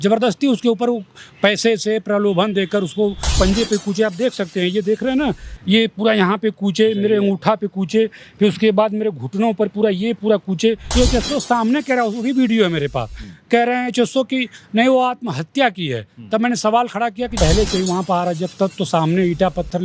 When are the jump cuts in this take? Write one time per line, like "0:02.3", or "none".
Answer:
0:03.3
0:10.8
0:17.3